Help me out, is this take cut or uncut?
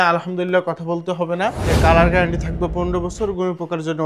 cut